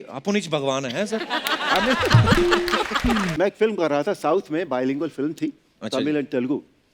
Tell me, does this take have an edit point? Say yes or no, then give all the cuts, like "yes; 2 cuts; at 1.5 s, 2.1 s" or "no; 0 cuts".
yes; 1 cut; at 3.3 s